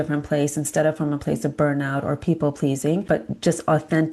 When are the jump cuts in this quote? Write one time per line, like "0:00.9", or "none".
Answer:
0:03.0